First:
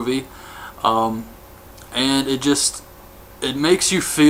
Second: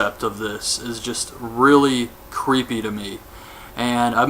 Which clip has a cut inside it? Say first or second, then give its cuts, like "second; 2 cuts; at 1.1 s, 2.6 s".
second; 1 cut; at 2.9 s